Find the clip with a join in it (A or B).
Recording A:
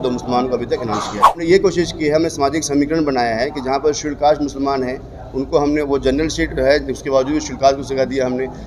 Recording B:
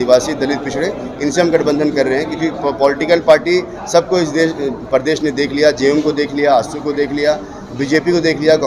A